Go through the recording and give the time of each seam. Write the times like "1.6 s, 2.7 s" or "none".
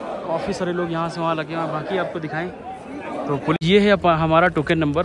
3.6 s